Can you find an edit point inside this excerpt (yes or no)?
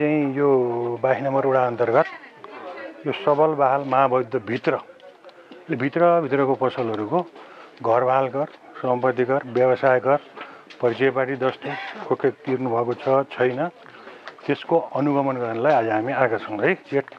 no